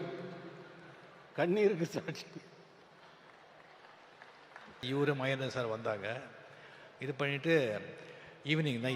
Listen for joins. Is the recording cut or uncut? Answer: cut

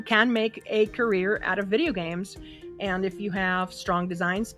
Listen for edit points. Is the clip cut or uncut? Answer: uncut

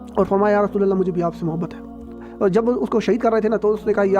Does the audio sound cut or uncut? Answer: cut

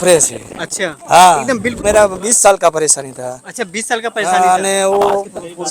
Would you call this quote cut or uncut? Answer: cut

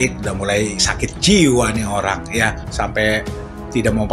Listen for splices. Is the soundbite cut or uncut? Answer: uncut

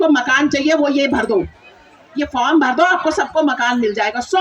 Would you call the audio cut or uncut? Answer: uncut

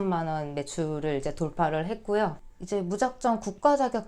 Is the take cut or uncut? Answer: cut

